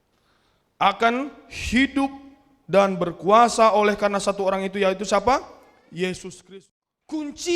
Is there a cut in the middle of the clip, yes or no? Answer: yes